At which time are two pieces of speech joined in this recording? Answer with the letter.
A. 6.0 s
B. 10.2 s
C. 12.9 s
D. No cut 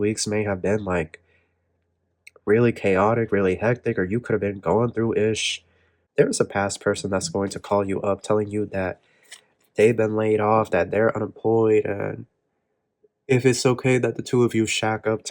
A